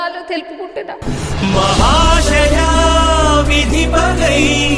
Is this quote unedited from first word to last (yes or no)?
yes